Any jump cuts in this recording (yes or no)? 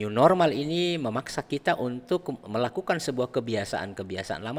no